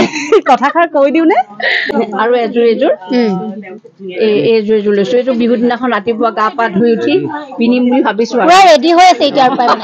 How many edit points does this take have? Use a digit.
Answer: 1